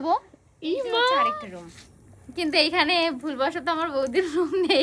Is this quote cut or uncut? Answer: cut